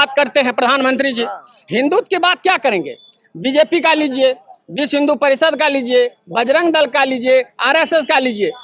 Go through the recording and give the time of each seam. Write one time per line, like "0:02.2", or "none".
none